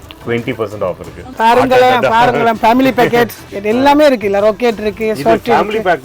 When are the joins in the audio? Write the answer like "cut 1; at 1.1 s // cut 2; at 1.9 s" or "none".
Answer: cut 1; at 1.3 s // cut 2; at 3.5 s